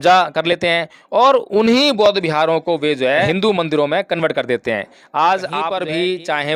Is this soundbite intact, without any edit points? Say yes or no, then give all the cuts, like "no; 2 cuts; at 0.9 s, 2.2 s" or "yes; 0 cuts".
no; 2 cuts; at 3.3 s, 5.7 s